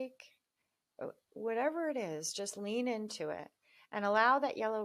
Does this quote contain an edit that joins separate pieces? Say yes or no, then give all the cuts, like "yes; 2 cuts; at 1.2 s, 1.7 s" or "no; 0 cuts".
no; 0 cuts